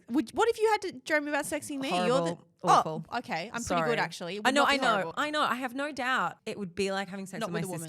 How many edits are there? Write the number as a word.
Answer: two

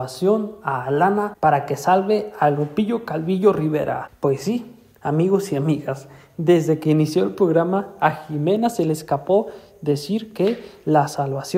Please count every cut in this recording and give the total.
two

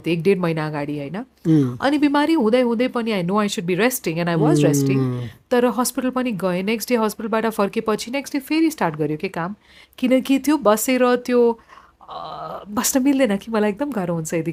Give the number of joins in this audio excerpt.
zero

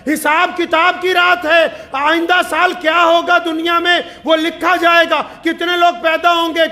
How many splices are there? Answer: zero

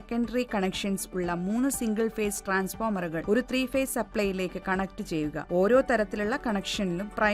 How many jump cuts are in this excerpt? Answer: two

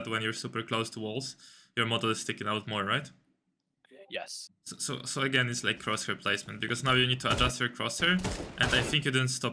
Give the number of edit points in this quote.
one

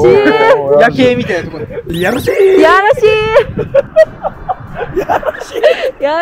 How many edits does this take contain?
zero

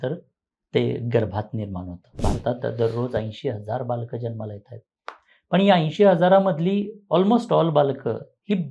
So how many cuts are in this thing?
one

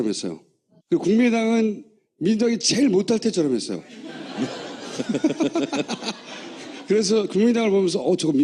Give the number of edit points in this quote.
zero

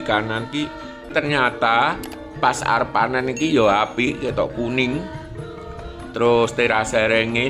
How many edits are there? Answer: one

